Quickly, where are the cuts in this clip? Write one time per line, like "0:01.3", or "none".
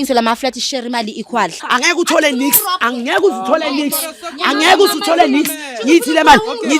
0:01.6
0:02.9